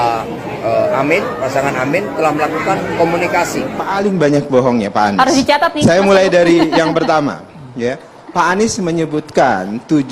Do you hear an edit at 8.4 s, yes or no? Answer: no